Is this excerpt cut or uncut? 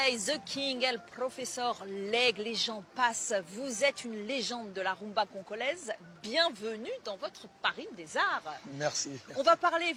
uncut